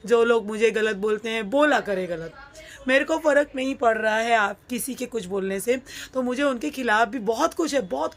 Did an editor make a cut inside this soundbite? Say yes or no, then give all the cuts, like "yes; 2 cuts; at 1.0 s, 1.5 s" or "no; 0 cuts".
no; 0 cuts